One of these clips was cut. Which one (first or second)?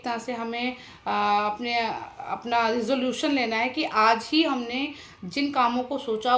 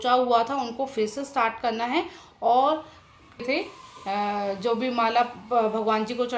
second